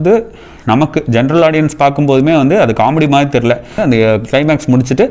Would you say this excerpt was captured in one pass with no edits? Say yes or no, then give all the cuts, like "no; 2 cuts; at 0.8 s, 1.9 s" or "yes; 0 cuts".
no; 1 cut; at 3.8 s